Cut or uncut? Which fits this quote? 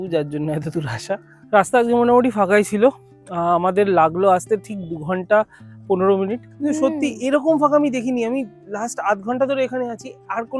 cut